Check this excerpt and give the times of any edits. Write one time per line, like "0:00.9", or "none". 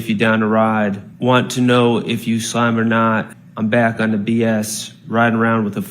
0:01.1
0:03.4